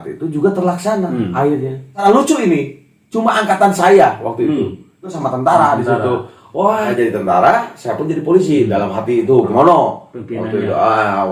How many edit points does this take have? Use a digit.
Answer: 4